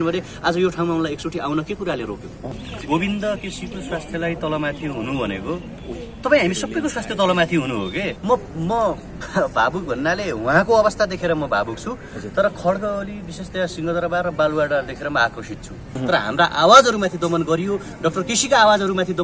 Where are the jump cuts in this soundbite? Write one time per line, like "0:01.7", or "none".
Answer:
0:02.5
0:08.1
0:15.9